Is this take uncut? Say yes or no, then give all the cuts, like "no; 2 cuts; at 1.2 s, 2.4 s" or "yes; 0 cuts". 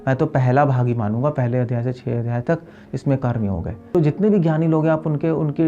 no; 1 cut; at 3.9 s